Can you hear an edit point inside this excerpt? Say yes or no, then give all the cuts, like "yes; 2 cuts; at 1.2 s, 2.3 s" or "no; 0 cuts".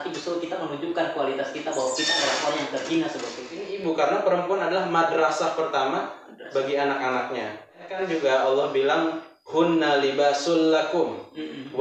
yes; 2 cuts; at 3.7 s, 8.0 s